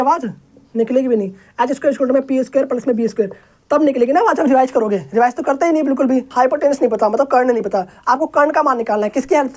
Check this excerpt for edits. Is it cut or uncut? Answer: cut